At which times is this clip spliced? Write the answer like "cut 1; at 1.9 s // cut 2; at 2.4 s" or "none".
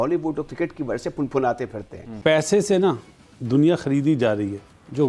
cut 1; at 2.3 s